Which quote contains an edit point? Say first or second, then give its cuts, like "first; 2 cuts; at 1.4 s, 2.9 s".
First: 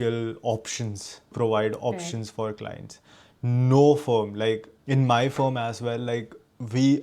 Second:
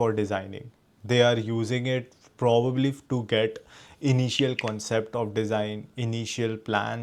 first; 2 cuts; at 1.3 s, 4.7 s